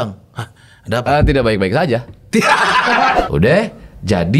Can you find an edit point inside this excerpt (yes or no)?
yes